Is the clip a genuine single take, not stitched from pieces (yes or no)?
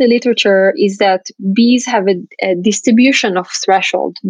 yes